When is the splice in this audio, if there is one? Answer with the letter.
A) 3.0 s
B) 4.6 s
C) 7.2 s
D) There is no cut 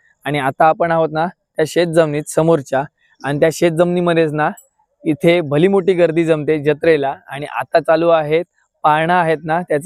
D